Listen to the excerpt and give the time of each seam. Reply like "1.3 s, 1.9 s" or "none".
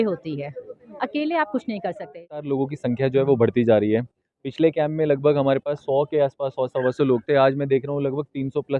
2.5 s